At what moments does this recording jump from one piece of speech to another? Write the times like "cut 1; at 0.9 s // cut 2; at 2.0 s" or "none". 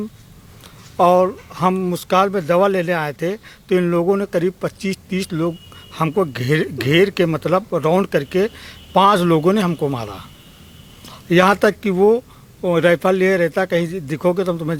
none

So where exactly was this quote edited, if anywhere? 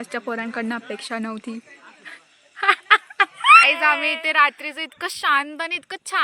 cut 1; at 3.6 s

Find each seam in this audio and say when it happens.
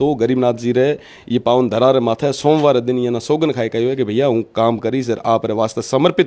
none

